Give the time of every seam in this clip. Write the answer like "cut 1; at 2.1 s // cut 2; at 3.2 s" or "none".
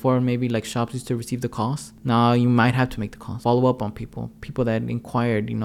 cut 1; at 1.9 s // cut 2; at 3.4 s